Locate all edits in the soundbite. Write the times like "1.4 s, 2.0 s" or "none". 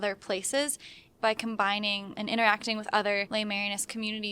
1.1 s, 2.1 s, 3.3 s